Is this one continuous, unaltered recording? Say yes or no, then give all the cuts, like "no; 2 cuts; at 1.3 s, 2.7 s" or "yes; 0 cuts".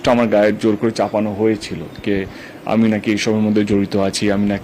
yes; 0 cuts